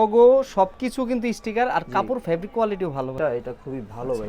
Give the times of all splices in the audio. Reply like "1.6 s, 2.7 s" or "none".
3.1 s